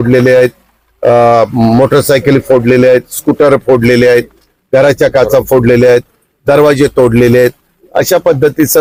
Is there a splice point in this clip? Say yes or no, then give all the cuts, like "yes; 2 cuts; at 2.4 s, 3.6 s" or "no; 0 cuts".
no; 0 cuts